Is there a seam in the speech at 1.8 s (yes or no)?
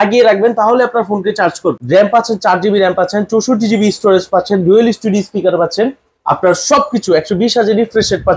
yes